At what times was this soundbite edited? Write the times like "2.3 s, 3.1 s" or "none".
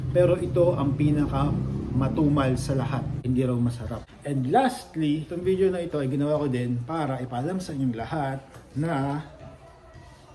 3.1 s, 4.0 s, 5.3 s